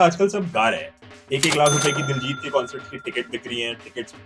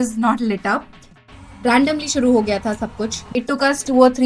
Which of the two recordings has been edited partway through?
second; 2 cuts; at 1.2 s, 3.3 s

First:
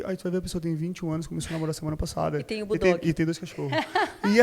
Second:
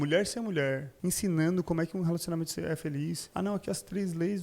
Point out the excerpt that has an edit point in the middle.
second; 2 cuts; at 0.9 s, 3.2 s

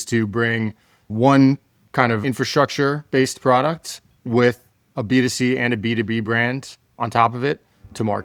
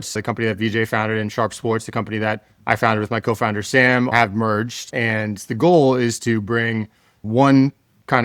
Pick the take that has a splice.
second; 1 cut; at 4.8 s

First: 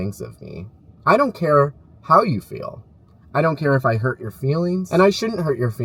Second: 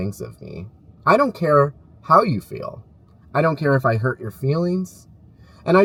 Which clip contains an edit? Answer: first; 1 cut; at 4.8 s

